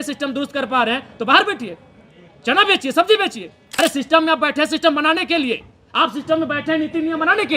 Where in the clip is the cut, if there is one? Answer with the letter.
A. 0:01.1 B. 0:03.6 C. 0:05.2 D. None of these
B